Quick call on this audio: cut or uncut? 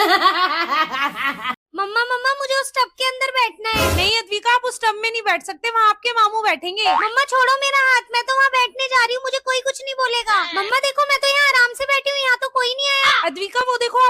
uncut